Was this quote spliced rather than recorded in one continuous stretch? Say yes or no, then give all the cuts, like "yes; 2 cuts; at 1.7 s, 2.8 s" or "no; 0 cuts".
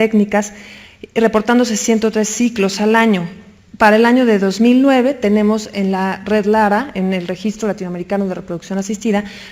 yes; 1 cut; at 3.0 s